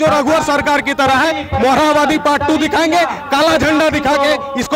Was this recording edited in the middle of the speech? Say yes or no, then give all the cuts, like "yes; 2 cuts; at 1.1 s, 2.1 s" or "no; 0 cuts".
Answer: no; 0 cuts